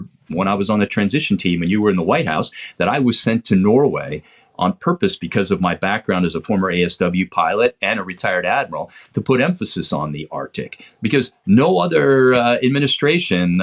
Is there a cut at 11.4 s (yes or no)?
no